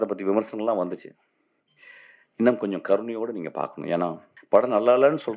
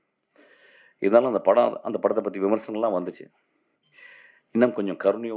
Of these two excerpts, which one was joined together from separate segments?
first; 1 cut; at 4.3 s

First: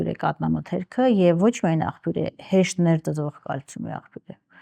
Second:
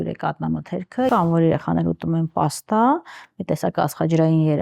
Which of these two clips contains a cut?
second; 1 cut; at 1.1 s

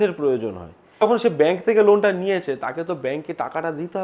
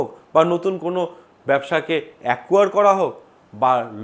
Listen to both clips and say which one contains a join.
first; 1 cut; at 1.0 s

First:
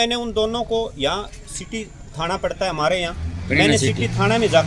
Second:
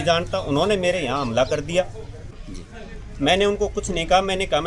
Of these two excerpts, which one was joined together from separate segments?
second; 1 cut; at 2.4 s

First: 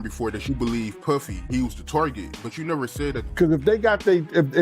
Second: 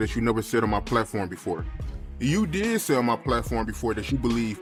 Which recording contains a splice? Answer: first; 1 cut; at 3.2 s

